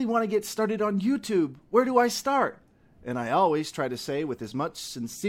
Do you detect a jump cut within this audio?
no; 0 cuts

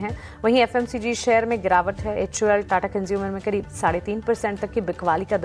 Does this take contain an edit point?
yes; 1 cut; at 1.1 s

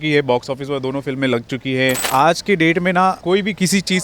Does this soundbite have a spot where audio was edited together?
yes; 2 cuts; at 2.1 s, 3.2 s

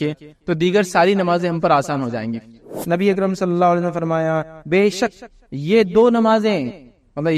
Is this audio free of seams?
no; 1 cut; at 2.7 s

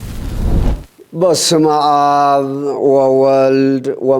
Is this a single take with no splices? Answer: no; 1 cut; at 1.0 s

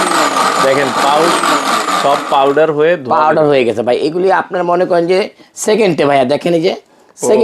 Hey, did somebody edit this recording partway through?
no; 0 cuts

